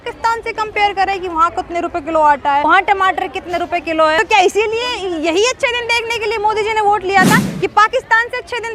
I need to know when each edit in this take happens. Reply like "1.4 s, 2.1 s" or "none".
2.6 s, 4.2 s